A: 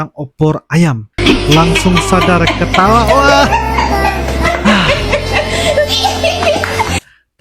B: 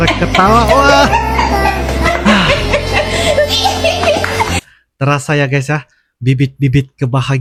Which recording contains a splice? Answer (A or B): A